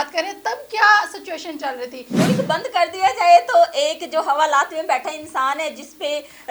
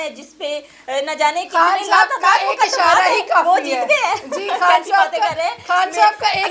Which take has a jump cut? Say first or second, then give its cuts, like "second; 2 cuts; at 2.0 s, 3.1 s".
first; 1 cut; at 2.1 s